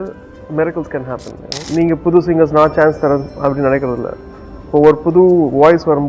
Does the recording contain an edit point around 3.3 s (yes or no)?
no